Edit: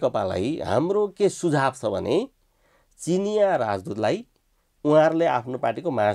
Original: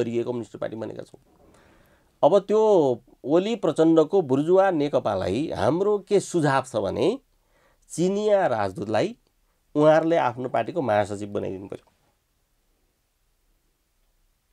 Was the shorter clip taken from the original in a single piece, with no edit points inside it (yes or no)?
yes